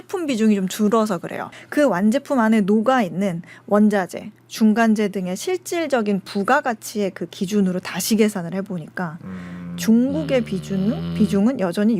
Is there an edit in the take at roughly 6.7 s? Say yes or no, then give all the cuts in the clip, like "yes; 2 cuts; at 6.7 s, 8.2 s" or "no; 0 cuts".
no; 1 cut; at 1.5 s